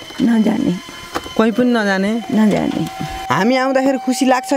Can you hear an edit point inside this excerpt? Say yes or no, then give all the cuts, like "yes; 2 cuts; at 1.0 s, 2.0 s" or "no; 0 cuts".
yes; 1 cut; at 3.3 s